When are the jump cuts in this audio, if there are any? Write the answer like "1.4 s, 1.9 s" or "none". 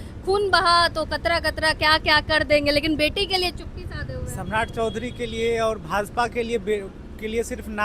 none